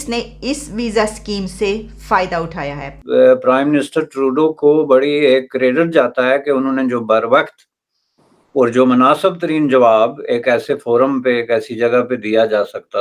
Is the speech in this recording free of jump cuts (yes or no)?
no